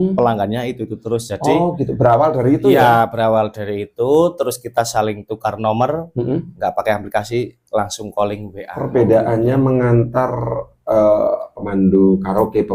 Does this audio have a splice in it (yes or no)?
yes